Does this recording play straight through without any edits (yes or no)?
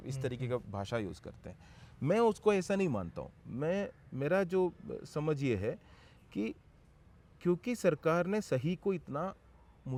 yes